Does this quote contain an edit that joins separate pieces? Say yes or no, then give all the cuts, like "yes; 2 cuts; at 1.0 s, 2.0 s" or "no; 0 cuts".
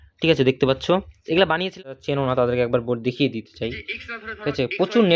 yes; 1 cut; at 1.9 s